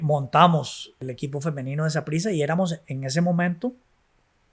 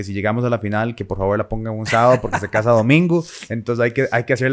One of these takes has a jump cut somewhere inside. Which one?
first; 1 cut; at 1.0 s

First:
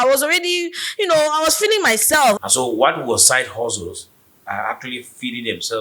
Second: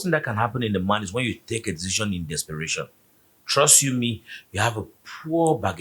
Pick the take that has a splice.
first; 1 cut; at 2.4 s

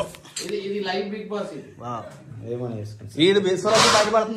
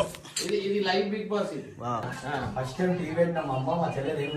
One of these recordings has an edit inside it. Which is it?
second; 1 cut; at 2.1 s

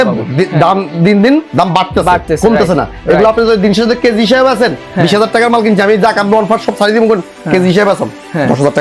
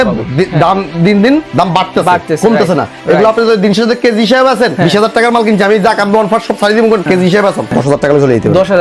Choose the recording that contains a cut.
second; 2 cuts; at 4.7 s, 7.3 s

